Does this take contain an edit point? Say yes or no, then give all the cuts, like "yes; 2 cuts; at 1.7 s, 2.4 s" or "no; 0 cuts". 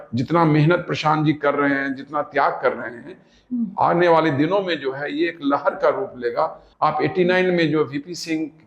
yes; 1 cut; at 6.6 s